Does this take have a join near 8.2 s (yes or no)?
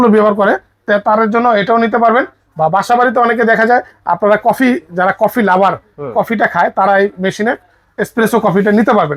no